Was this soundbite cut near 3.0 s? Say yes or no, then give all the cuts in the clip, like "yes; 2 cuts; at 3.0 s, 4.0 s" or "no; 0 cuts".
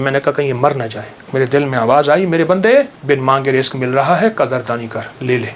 yes; 2 cuts; at 1.3 s, 3.0 s